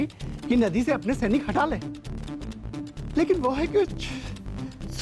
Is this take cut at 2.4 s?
yes; 1 cut; at 2.4 s

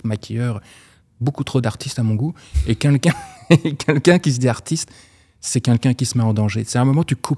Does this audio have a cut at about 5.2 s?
no; 0 cuts

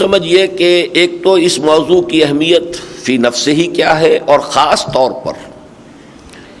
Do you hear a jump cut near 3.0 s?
no; 0 cuts

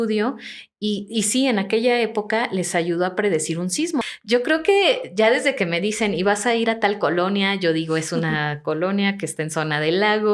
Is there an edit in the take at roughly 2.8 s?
no; 1 cut; at 4.0 s

